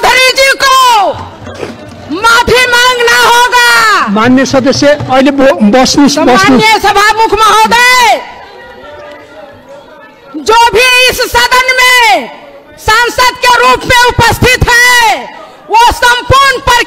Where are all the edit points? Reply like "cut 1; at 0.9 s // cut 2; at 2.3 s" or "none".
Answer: none